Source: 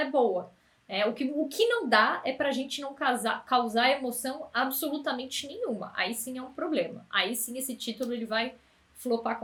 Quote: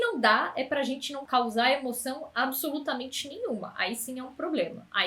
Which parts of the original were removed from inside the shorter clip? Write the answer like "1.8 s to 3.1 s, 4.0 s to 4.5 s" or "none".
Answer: 2.9 s to 3.4 s